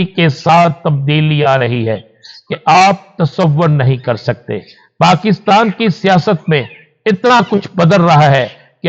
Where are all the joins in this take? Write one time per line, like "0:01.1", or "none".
none